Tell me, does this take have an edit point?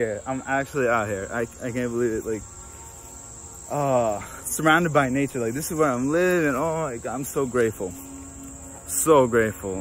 no; 0 cuts

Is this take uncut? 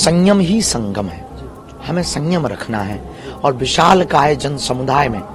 yes; 0 cuts

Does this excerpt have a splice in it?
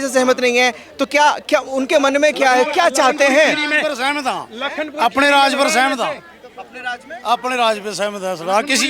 no; 0 cuts

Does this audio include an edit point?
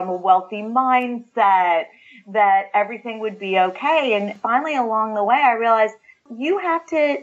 yes; 1 cut; at 6.2 s

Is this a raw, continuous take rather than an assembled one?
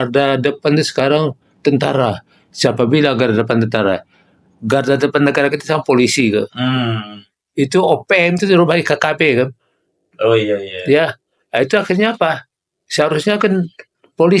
yes; 0 cuts

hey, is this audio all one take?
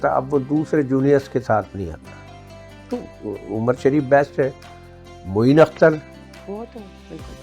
yes; 0 cuts

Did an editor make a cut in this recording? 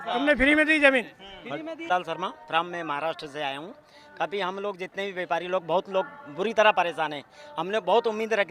yes; 1 cut; at 1.9 s

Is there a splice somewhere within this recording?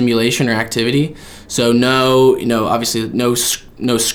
no; 0 cuts

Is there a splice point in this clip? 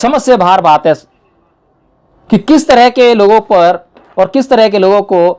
no; 0 cuts

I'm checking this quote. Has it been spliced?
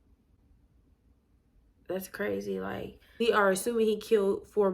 yes; 1 cut; at 3.2 s

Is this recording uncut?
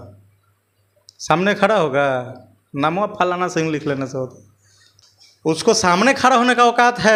yes; 0 cuts

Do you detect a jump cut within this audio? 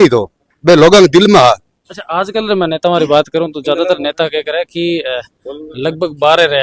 no; 0 cuts

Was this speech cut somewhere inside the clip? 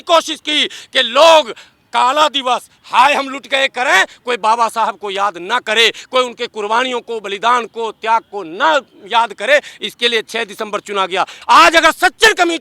yes; 1 cut; at 11.3 s

